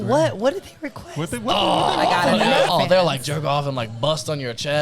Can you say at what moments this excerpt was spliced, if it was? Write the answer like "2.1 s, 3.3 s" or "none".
2.7 s